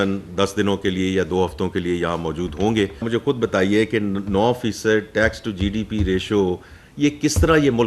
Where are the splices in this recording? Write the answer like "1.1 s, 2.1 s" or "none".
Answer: 3.1 s